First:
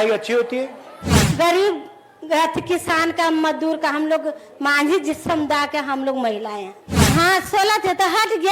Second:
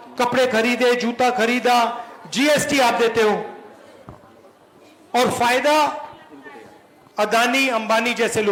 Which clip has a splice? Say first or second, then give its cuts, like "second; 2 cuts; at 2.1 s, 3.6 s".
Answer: first; 2 cuts; at 1.1 s, 7.0 s